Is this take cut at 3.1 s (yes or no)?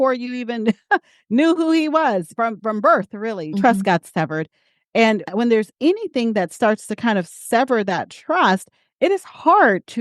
no